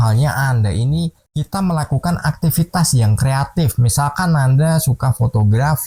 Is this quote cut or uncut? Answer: cut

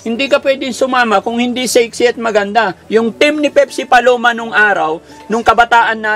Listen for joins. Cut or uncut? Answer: uncut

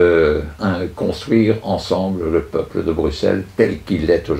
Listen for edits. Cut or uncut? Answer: uncut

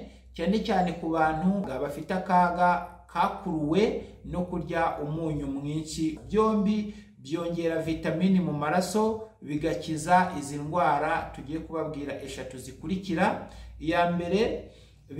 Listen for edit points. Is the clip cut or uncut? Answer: cut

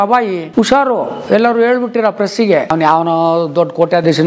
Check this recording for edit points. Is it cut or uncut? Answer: cut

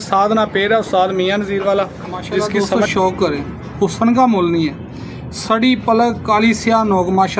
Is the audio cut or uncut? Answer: cut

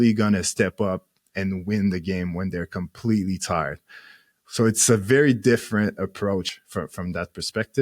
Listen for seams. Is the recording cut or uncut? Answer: cut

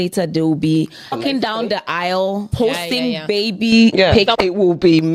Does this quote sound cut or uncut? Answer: cut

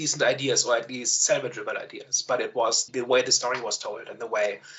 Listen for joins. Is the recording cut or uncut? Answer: cut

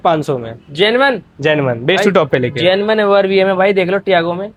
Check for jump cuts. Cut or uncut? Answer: uncut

